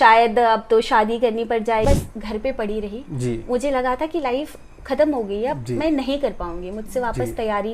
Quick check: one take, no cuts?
no; 1 cut; at 1.8 s

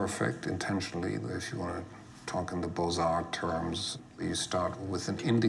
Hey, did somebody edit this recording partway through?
no; 0 cuts

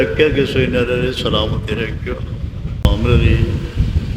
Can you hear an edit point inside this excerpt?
yes; 1 cut; at 2.8 s

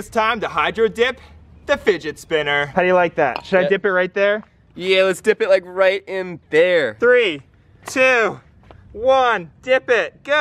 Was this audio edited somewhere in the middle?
yes; 2 cuts; at 2.6 s, 6.9 s

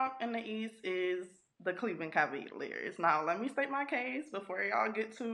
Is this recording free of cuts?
yes; 0 cuts

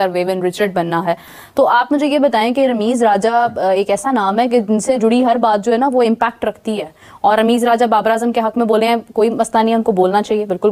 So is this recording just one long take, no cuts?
yes; 0 cuts

